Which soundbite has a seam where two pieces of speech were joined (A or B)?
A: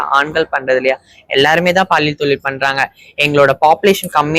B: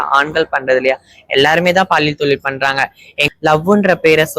B